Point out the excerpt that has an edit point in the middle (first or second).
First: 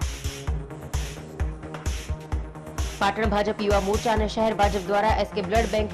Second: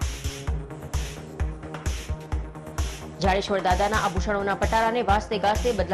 first